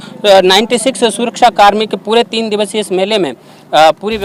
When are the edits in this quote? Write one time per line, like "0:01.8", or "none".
none